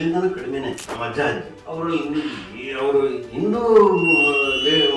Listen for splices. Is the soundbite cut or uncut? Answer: cut